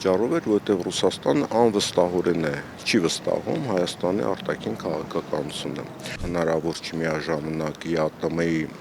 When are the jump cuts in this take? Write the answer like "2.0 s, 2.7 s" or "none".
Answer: 6.2 s